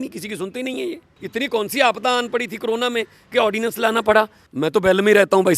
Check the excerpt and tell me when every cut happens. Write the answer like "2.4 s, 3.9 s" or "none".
1.1 s, 4.4 s

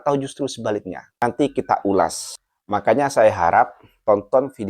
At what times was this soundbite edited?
1.1 s

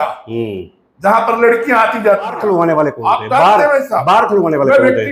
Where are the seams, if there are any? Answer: 2.4 s

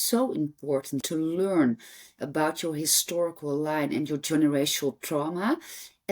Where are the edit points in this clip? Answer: 1.0 s

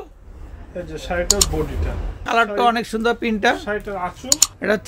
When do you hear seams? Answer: 2.2 s

